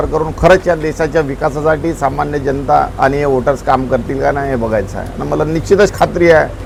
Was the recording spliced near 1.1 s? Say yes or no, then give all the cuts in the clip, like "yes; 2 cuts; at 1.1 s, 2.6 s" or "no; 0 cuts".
no; 0 cuts